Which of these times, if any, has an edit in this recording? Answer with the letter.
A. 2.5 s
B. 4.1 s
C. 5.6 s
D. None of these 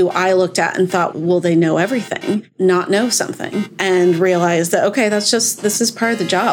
A